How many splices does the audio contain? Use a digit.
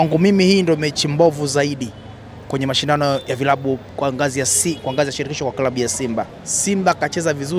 1